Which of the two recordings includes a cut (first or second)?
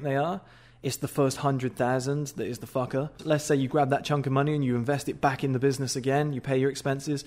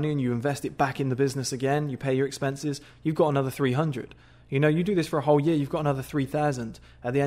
first